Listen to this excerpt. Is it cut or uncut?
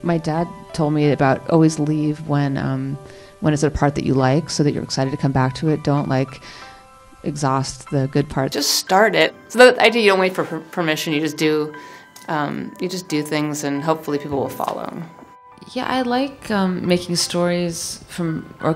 cut